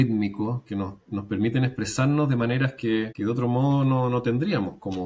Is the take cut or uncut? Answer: cut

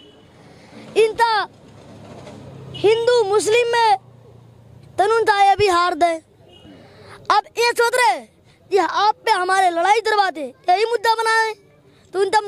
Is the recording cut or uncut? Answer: uncut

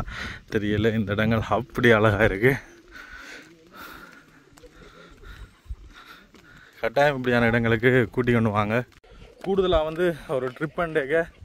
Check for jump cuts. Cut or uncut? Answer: uncut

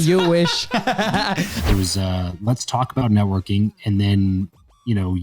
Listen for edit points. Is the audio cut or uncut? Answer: cut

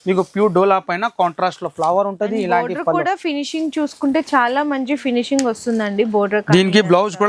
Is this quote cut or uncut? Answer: uncut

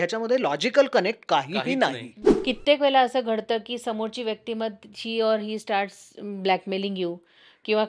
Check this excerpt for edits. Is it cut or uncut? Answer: cut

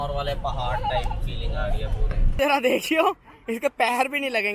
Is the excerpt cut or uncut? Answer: cut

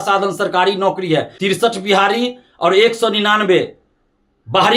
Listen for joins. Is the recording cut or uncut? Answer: cut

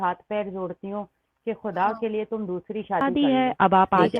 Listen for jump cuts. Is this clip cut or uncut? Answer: cut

